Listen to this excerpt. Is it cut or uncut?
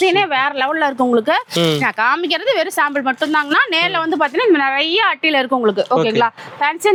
uncut